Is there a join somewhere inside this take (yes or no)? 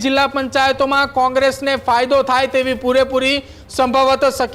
no